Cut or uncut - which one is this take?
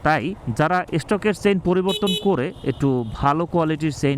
uncut